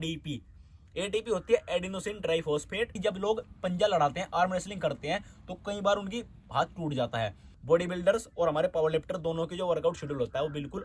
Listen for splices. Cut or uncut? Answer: cut